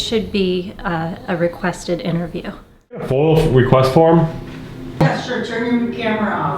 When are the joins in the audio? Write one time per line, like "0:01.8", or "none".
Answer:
0:03.1
0:05.0